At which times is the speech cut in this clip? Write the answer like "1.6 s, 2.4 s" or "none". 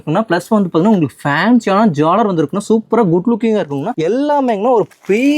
3.9 s